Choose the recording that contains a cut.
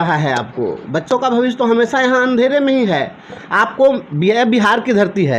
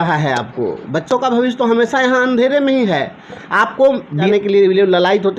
second; 1 cut; at 4.3 s

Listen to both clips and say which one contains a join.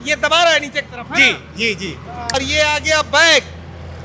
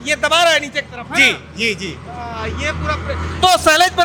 first; 1 cut; at 2.3 s

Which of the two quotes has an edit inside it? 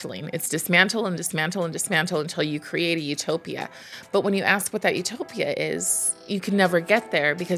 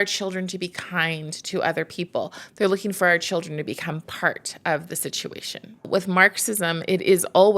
second; 1 cut; at 5.9 s

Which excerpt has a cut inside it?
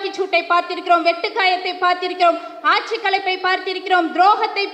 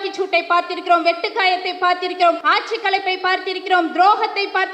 second; 1 cut; at 2.4 s

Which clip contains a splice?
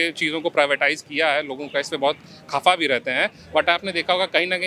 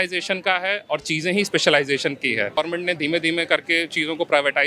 second; 1 cut; at 2.5 s

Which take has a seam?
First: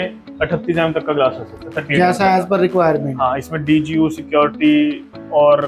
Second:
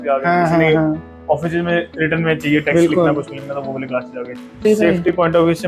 second; 1 cut; at 4.6 s

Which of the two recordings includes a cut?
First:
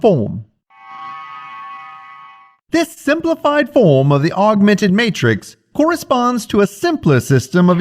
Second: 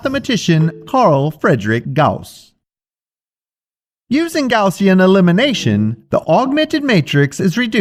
first; 1 cut; at 1.3 s

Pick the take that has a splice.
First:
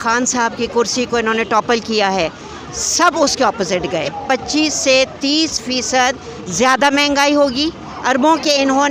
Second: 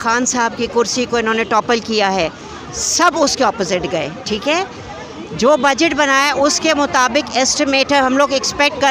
first; 2 cuts; at 4.2 s, 7.9 s

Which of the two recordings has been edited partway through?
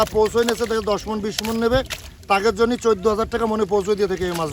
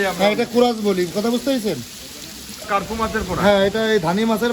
second; 1 cut; at 2.7 s

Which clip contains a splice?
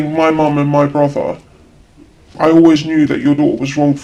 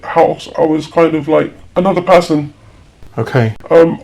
second; 1 cut; at 1.6 s

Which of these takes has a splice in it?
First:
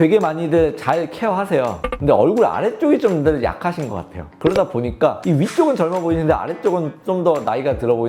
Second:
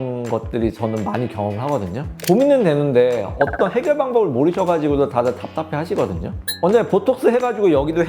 second; 2 cuts; at 2.1 s, 6.5 s

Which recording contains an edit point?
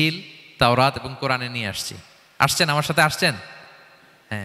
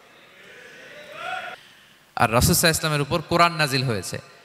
second; 1 cut; at 1.6 s

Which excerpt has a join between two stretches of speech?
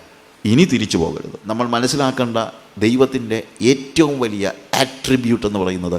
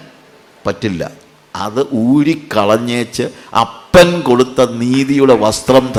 first; 1 cut; at 1.3 s

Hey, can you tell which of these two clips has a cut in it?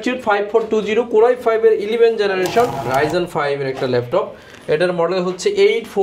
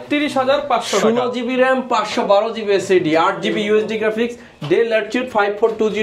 first; 1 cut; at 2.9 s

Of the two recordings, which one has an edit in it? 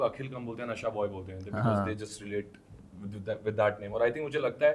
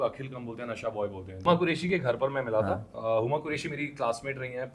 second; 1 cut; at 1.4 s

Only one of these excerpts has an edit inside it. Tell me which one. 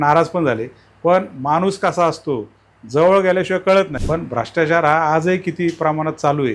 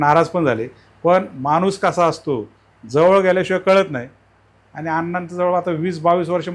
first; 1 cut; at 4.0 s

